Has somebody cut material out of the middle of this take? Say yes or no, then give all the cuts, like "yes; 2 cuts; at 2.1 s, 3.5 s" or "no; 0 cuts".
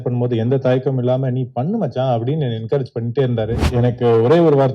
yes; 1 cut; at 3.7 s